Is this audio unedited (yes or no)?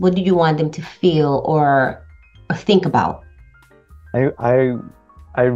yes